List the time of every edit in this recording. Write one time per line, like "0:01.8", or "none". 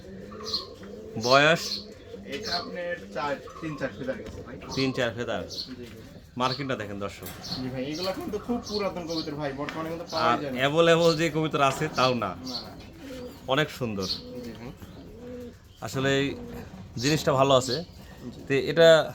none